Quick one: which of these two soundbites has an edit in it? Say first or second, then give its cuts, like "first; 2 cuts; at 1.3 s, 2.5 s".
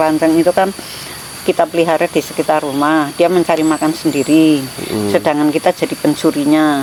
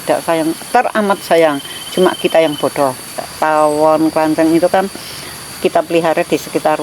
second; 1 cut; at 3.2 s